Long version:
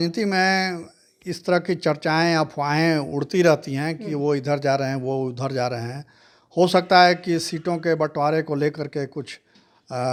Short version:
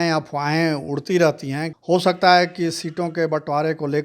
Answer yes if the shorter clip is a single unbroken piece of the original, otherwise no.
no